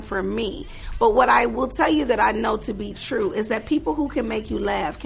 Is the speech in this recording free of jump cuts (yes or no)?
yes